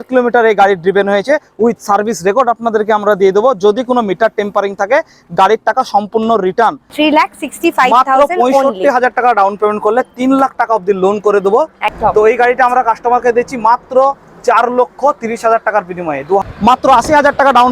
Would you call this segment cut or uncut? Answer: cut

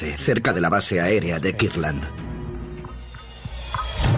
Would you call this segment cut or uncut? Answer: cut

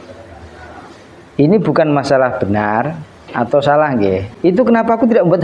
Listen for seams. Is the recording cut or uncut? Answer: cut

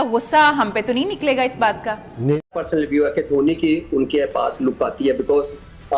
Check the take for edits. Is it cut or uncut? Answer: cut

